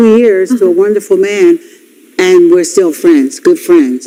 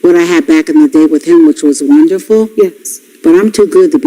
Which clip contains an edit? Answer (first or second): second